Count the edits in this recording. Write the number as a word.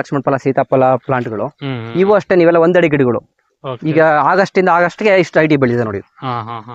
zero